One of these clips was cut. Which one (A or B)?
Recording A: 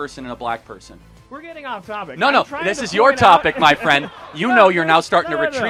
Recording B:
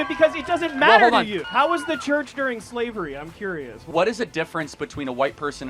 B